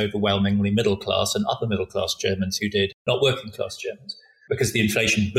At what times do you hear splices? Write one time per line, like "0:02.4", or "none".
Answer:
0:03.0
0:04.3